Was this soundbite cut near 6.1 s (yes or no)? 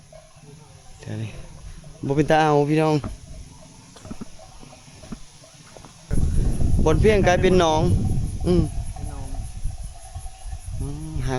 yes